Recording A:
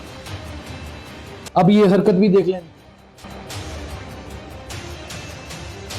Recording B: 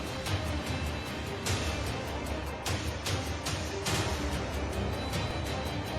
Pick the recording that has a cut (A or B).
B